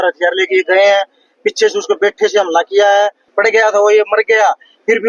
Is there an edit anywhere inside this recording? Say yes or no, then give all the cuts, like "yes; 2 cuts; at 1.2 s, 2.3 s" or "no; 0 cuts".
yes; 1 cut; at 3.2 s